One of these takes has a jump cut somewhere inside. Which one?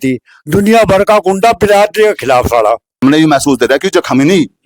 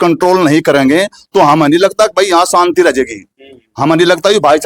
first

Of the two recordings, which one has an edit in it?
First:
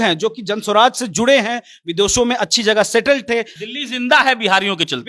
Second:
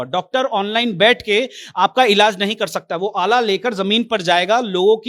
first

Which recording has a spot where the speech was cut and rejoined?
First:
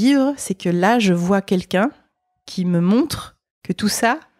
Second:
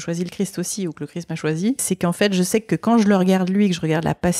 second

